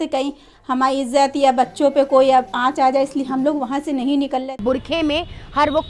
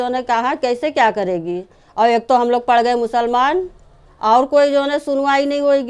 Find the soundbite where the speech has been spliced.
first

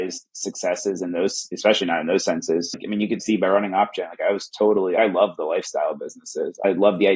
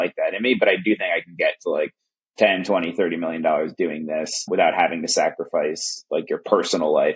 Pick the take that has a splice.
first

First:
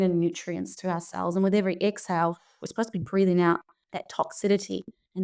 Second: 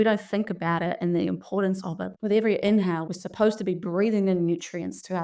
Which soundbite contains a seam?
second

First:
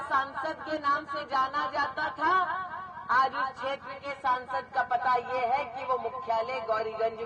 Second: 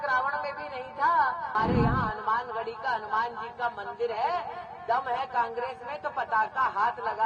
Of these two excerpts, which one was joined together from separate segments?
second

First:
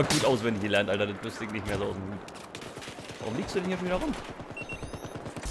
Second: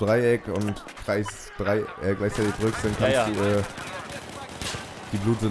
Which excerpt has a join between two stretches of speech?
first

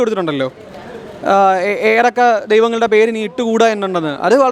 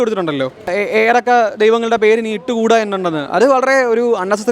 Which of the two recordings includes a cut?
second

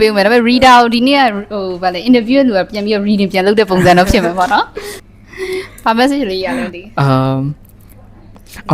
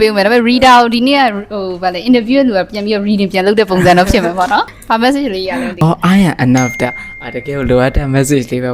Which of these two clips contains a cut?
second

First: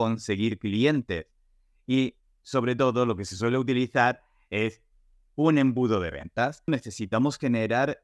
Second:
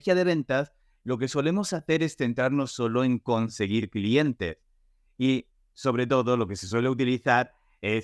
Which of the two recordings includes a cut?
first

